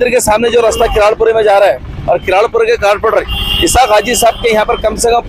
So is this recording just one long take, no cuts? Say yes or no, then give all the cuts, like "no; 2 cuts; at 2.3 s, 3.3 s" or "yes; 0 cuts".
yes; 0 cuts